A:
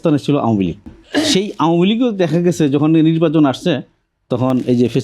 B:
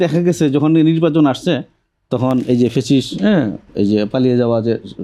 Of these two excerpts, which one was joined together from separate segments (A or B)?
A